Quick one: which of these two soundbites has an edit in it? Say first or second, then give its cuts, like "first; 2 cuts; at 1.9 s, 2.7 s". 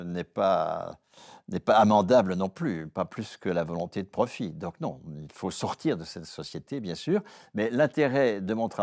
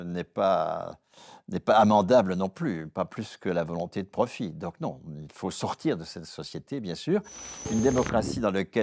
second; 1 cut; at 7.4 s